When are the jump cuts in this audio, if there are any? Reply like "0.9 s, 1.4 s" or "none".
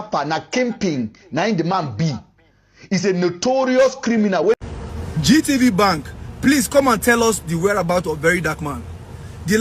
4.6 s